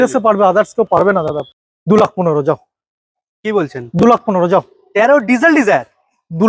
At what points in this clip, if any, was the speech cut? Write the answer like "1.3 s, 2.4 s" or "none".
1.2 s